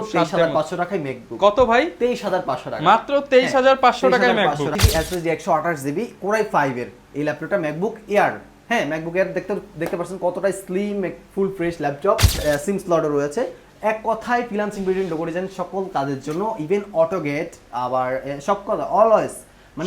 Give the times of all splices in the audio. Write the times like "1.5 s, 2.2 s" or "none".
4.7 s, 12.4 s